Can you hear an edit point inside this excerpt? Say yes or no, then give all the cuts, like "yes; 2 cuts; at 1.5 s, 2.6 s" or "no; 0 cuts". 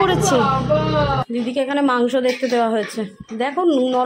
yes; 1 cut; at 1.2 s